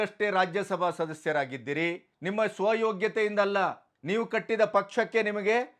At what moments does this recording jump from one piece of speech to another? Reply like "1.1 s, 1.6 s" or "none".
2.1 s, 3.9 s

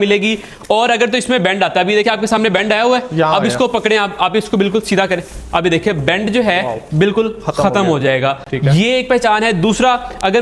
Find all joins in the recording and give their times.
none

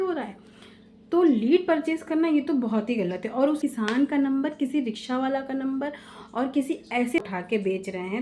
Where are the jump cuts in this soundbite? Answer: 3.6 s, 7.2 s

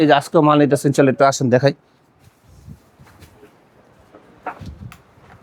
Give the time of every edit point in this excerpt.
none

